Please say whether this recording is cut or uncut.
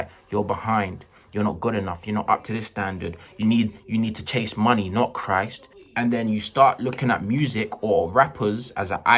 uncut